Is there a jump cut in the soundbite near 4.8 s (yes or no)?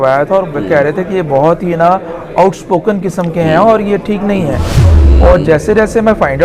yes